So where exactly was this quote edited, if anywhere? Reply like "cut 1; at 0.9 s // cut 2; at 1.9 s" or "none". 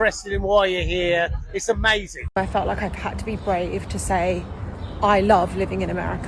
cut 1; at 2.1 s